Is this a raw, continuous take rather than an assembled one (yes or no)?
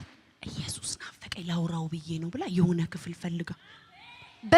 yes